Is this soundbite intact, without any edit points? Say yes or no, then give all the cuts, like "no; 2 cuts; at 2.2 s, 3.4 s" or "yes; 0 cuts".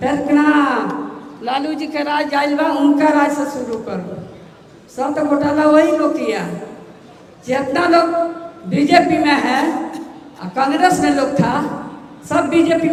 yes; 0 cuts